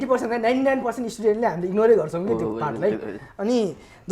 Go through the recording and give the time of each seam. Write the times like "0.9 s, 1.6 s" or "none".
none